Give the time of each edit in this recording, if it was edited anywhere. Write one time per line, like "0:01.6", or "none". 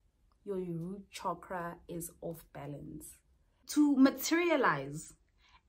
0:03.6